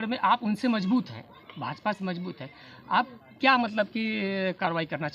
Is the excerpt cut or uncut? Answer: uncut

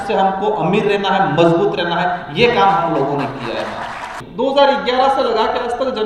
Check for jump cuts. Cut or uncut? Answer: cut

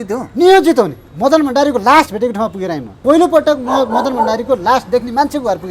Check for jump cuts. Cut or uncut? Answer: cut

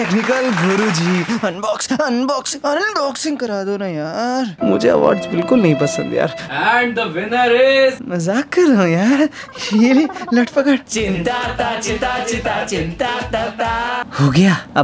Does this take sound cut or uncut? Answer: uncut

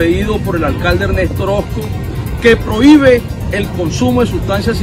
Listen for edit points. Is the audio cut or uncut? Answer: uncut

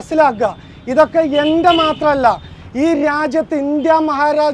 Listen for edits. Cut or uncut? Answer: uncut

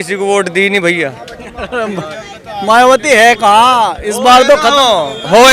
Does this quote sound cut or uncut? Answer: uncut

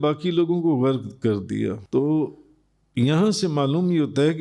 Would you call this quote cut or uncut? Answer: cut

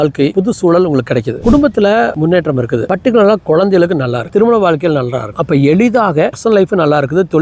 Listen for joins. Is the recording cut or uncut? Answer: cut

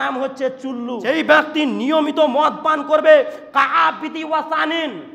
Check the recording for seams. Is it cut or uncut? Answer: cut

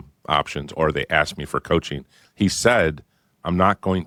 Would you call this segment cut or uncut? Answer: uncut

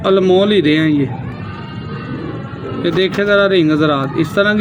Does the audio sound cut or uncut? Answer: uncut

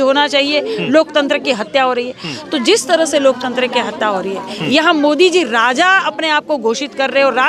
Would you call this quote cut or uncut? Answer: uncut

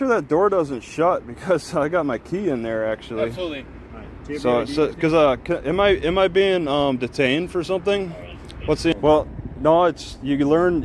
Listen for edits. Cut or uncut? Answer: cut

